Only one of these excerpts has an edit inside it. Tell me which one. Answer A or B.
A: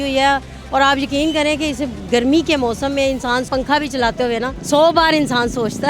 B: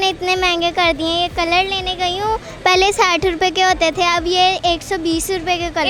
A